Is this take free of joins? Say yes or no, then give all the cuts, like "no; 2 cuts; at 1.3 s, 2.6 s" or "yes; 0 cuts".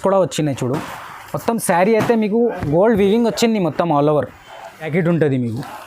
no; 1 cut; at 4.9 s